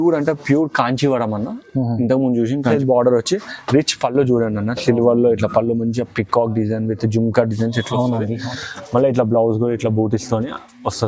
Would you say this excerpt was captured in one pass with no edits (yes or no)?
no